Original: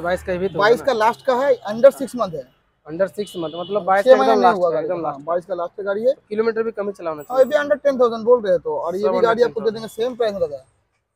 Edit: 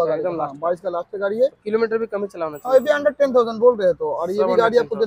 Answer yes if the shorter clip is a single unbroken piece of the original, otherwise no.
yes